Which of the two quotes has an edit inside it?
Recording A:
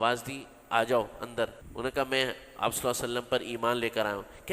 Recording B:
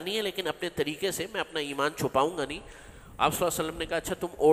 A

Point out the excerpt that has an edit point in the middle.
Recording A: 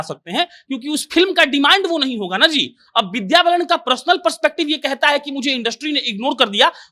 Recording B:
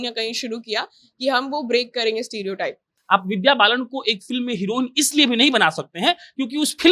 B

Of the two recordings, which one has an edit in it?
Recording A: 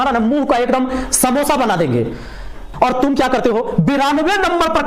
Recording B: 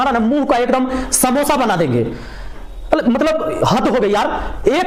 A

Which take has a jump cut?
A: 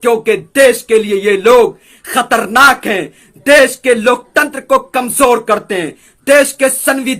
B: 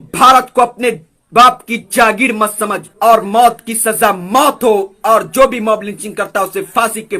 B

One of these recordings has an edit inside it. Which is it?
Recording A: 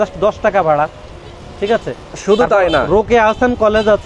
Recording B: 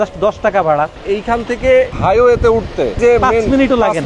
B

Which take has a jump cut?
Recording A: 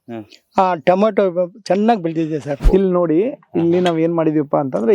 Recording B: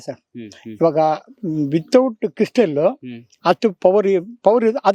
A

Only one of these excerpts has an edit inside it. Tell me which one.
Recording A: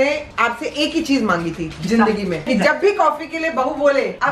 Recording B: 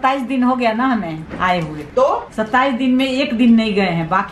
A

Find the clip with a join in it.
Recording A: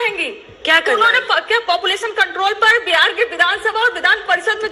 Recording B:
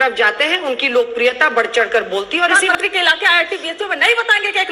B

